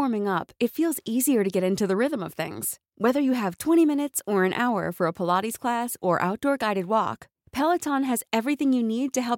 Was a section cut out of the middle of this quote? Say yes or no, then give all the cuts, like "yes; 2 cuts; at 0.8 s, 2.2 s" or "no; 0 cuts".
no; 0 cuts